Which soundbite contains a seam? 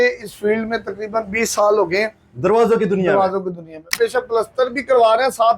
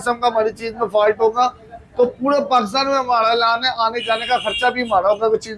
first; 1 cut; at 3.9 s

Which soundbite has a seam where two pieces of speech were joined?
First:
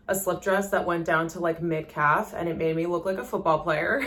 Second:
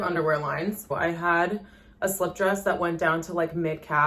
second; 1 cut; at 0.9 s

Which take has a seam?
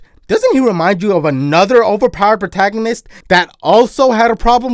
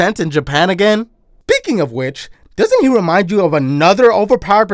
second; 1 cut; at 1.2 s

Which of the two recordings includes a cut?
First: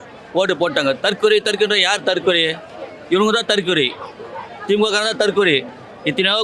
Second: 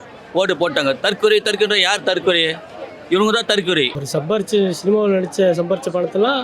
second; 1 cut; at 4.0 s

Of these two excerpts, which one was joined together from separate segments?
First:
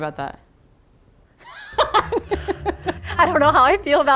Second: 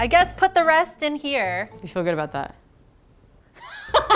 first; 1 cut; at 3.0 s

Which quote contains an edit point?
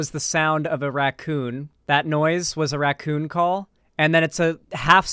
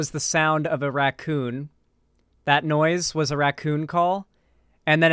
first; 2 cuts; at 1.7 s, 3.8 s

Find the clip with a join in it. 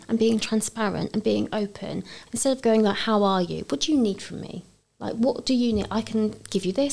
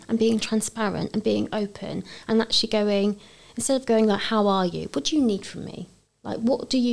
first; 1 cut; at 2.1 s

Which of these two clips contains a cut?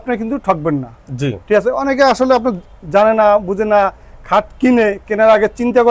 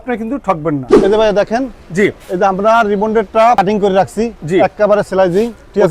second; 2 cuts; at 0.9 s, 3.6 s

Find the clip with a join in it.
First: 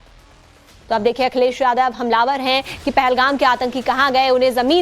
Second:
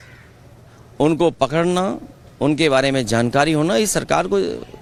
first; 1 cut; at 2.5 s

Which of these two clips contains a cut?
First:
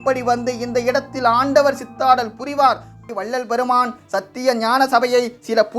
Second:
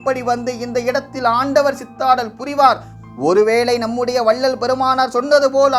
first; 1 cut; at 3.1 s

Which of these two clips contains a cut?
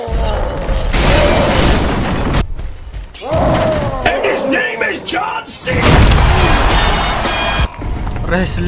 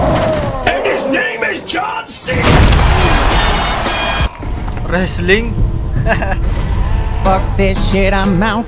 first; 1 cut; at 2.4 s

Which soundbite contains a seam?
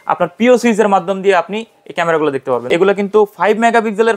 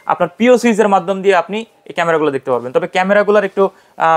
first; 1 cut; at 2.7 s

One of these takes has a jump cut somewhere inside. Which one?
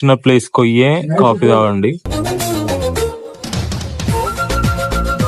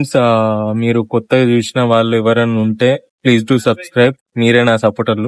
first; 1 cut; at 2.1 s

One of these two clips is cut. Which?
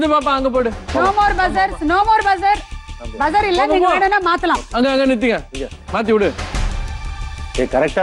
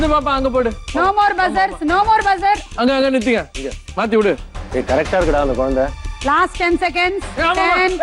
second; 2 cuts; at 2.7 s, 4.5 s

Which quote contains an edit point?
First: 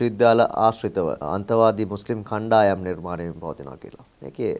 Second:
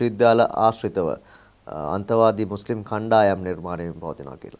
first; 1 cut; at 1.2 s

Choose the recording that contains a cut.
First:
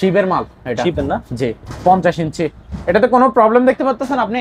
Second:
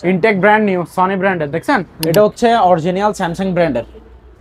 second; 1 cut; at 2.0 s

